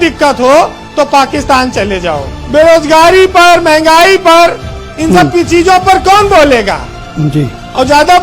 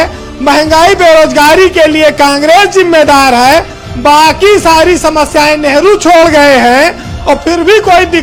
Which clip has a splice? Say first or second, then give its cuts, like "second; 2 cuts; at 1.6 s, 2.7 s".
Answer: first; 1 cut; at 2.3 s